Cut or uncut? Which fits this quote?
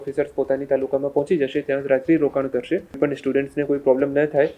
cut